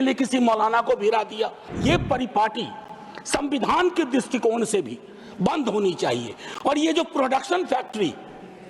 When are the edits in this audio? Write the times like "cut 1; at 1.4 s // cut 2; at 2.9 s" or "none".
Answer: cut 1; at 1.7 s